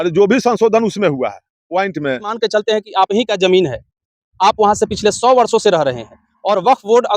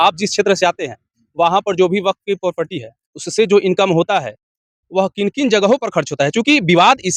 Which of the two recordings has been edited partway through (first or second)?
first